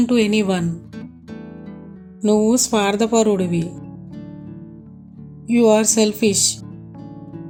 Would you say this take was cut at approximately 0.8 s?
no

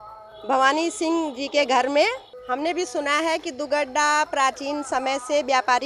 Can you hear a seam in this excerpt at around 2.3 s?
yes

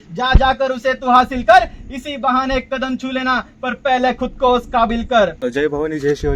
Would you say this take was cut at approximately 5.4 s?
yes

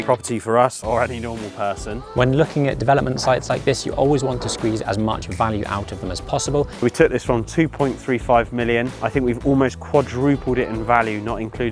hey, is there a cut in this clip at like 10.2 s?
no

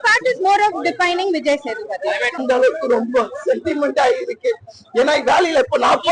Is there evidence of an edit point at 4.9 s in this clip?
no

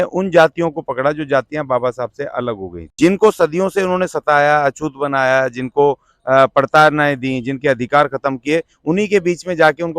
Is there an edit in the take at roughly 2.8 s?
yes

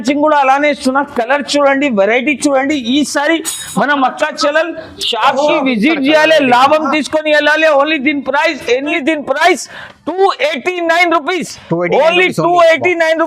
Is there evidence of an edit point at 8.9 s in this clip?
yes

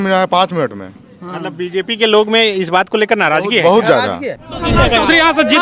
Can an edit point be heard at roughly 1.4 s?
no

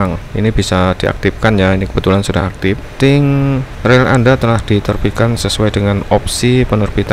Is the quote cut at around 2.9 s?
yes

